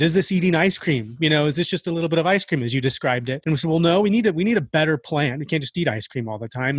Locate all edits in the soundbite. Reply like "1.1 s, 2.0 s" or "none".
3.3 s